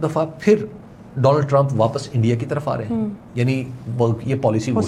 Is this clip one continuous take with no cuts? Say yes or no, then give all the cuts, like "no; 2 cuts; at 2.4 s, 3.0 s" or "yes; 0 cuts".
yes; 0 cuts